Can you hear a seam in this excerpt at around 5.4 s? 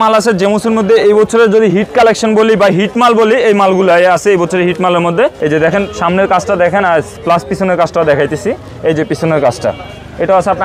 yes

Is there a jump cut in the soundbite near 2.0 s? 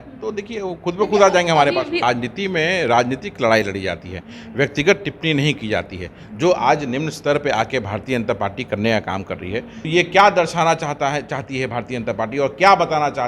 yes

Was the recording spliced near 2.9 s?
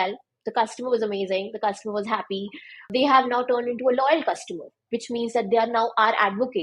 yes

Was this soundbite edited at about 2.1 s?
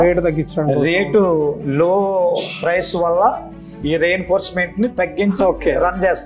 no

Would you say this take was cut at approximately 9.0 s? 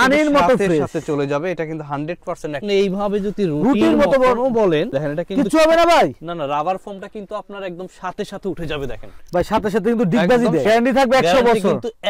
no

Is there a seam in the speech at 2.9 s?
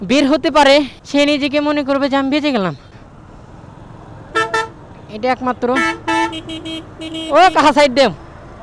yes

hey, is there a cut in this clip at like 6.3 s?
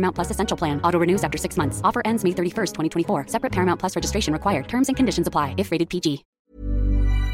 no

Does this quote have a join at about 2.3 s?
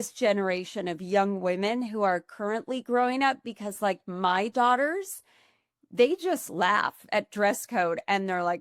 no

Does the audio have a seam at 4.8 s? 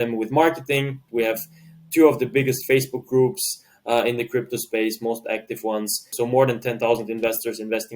no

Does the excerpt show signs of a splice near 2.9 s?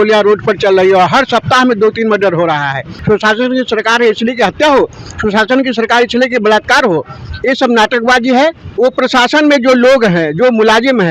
yes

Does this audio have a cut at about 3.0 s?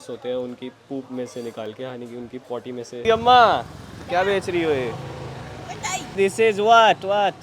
yes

